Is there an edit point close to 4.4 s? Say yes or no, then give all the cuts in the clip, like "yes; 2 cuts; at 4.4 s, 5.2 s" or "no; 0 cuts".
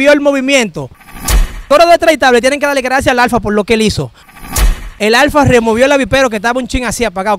yes; 2 cuts; at 1.4 s, 4.4 s